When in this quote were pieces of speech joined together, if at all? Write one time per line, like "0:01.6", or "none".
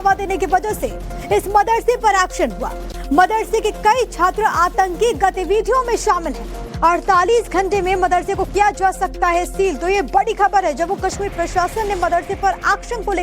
0:11.7